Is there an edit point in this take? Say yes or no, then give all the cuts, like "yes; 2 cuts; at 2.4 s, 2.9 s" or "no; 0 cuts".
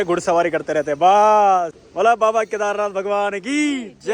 yes; 1 cut; at 1.8 s